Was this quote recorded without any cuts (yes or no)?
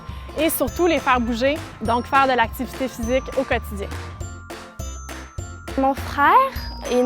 no